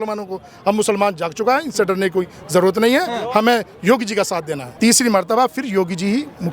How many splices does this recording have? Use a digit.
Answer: 1